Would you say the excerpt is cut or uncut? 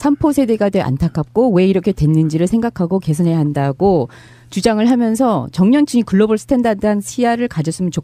uncut